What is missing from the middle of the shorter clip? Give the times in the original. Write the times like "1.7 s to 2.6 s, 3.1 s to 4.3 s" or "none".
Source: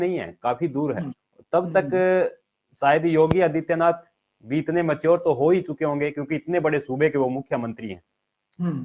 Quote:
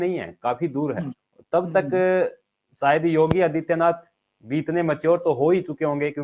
none